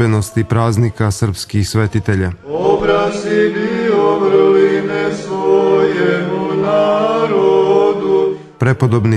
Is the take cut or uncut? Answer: cut